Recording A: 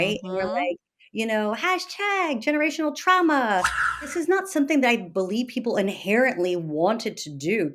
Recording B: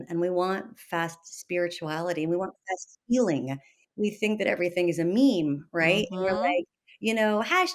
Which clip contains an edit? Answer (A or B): A